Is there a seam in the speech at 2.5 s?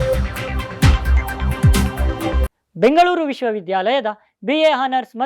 yes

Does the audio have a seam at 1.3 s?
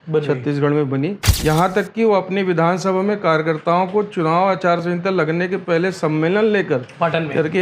yes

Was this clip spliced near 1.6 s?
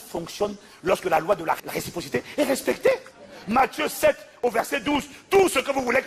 yes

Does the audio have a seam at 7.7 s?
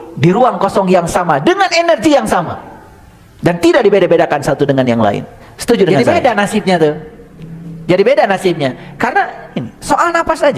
no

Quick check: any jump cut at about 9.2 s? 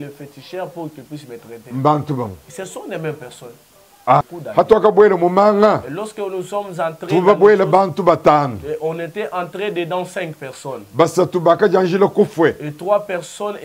no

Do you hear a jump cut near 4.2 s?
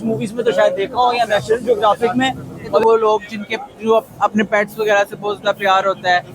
no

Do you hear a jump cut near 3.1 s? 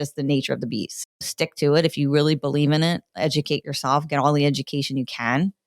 no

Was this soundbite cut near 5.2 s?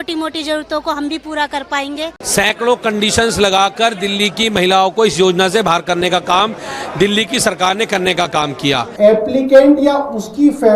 no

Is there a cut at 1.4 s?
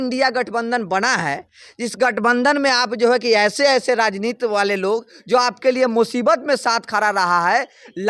no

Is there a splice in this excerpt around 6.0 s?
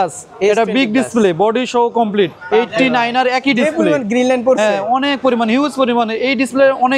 no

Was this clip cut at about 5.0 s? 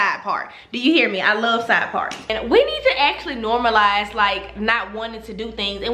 no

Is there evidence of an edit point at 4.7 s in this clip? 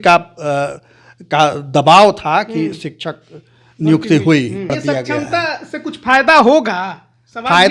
yes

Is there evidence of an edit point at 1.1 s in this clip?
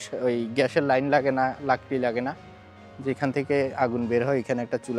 no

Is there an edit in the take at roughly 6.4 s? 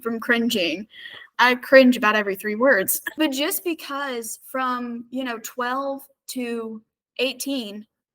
no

